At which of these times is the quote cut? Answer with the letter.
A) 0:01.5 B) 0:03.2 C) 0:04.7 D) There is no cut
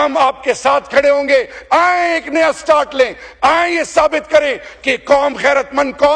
D